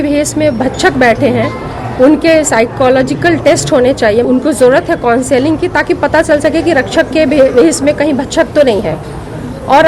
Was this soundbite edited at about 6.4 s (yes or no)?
no